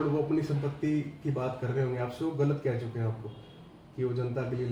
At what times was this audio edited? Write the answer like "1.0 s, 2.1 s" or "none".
none